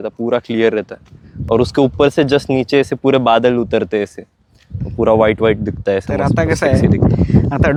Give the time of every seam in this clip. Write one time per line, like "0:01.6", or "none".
none